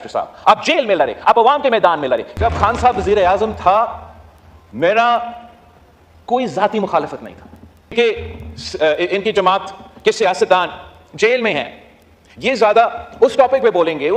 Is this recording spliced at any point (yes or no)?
yes